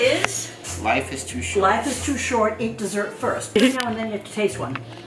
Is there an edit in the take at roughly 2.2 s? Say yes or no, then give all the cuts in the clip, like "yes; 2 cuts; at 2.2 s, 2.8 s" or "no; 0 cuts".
no; 1 cut; at 3.5 s